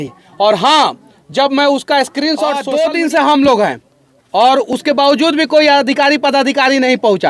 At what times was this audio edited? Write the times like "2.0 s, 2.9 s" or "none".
2.6 s